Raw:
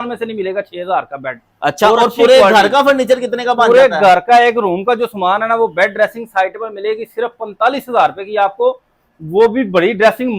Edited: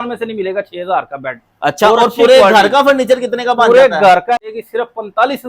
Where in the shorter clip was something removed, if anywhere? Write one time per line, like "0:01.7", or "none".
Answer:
0:04.3